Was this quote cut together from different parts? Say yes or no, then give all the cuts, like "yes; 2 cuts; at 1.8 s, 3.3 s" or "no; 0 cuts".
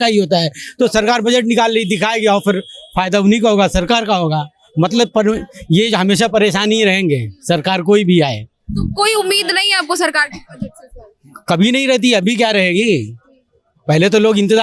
no; 0 cuts